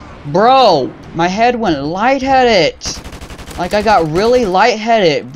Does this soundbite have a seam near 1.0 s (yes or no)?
yes